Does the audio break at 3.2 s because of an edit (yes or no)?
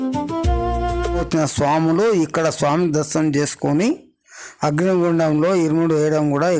no